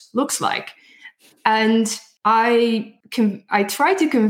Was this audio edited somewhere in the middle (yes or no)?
yes